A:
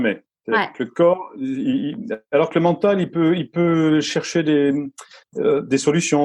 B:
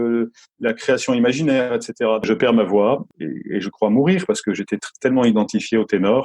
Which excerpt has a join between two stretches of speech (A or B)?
B